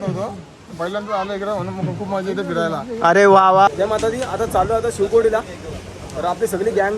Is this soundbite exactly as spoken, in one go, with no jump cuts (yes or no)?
no